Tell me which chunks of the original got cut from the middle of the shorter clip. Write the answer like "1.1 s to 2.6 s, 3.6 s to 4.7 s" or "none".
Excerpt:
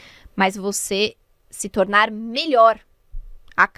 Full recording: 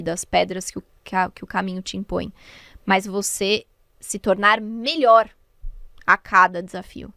none